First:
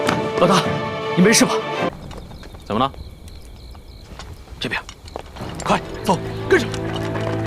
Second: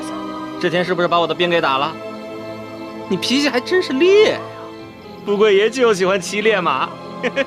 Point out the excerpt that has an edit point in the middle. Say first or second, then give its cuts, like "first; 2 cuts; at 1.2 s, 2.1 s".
first; 1 cut; at 1.9 s